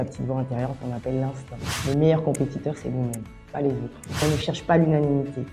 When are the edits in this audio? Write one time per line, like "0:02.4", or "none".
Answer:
0:01.7
0:04.2